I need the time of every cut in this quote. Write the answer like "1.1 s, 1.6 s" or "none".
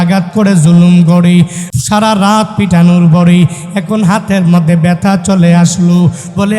1.6 s